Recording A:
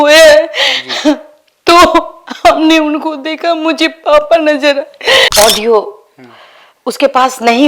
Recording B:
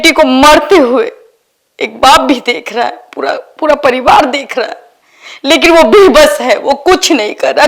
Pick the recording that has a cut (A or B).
A